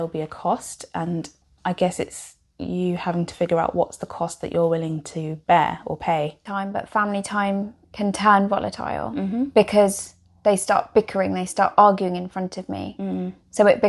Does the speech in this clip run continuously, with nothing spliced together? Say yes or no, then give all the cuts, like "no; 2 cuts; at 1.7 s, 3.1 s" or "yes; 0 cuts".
no; 2 cuts; at 1.4 s, 6.4 s